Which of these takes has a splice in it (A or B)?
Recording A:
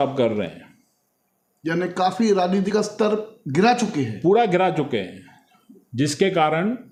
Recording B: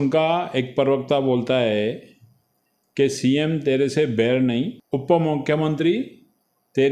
B